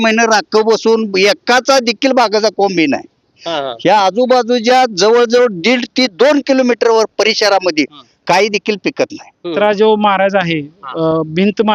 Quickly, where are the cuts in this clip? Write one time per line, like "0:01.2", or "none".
0:09.5